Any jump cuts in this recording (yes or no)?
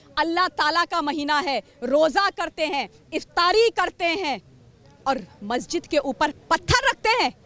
no